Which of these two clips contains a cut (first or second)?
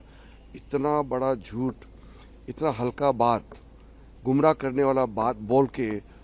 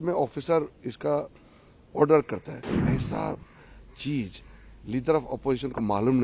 second